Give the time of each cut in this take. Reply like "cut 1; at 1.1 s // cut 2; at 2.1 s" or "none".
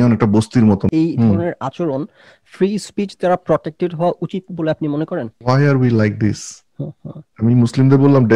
cut 1; at 0.9 s // cut 2; at 5.3 s